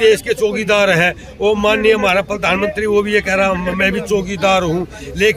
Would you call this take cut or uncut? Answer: uncut